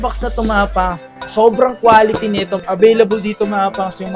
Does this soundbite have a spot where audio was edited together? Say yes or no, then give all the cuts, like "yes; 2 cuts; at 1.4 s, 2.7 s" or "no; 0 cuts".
yes; 1 cut; at 2.6 s